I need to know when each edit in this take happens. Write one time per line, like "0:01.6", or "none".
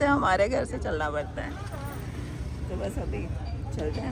none

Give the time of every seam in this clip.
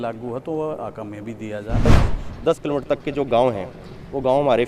0:01.9

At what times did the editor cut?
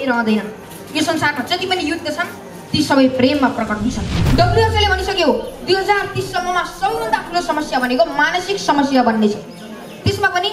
0:04.1

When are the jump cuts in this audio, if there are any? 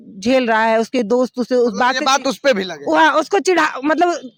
none

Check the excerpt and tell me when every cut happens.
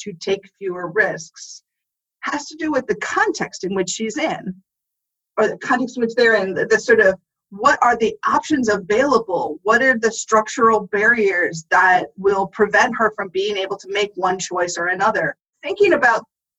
0:15.6

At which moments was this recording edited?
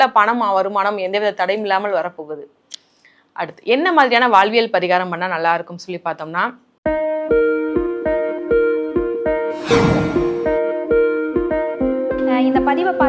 0:06.7

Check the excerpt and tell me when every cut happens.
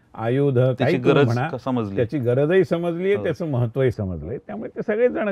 none

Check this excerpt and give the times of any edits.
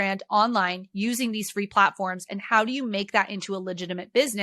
none

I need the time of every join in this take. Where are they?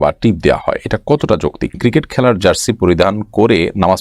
0:01.8

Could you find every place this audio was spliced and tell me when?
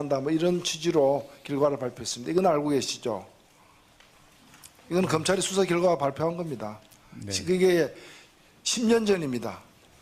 none

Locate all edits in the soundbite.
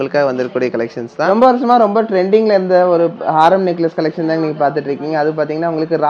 0:01.2

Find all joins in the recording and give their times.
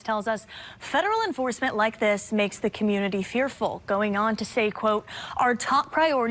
0:01.4

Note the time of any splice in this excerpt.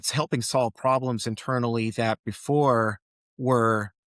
none

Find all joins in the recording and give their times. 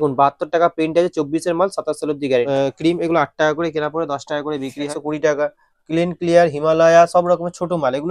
0:02.5
0:04.9

